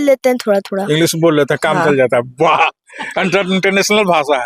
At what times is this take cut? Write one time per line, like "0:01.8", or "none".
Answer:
none